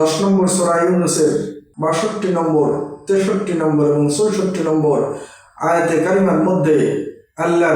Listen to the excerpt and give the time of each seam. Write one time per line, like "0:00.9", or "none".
0:01.6